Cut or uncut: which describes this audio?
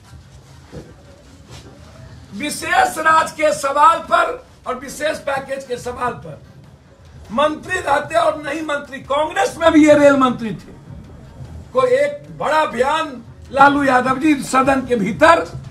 uncut